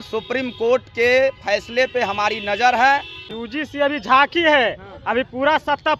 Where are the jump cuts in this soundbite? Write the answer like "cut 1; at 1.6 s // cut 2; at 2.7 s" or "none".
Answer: cut 1; at 3.3 s